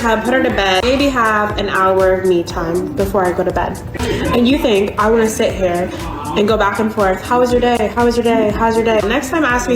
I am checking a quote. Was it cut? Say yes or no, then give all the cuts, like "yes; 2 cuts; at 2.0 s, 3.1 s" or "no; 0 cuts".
yes; 3 cuts; at 0.8 s, 3.9 s, 9.0 s